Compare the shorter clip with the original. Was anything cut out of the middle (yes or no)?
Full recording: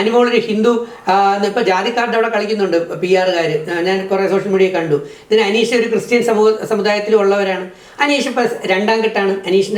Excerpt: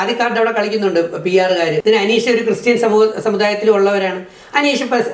yes